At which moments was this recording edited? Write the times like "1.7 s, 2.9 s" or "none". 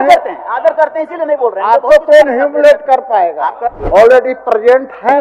3.7 s